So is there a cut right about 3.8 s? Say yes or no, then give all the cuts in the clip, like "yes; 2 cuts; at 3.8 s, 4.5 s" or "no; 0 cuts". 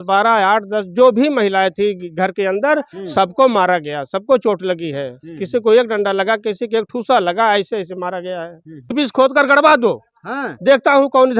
no; 1 cut; at 8.9 s